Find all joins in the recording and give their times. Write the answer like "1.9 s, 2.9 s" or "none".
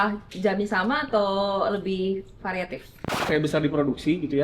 3.1 s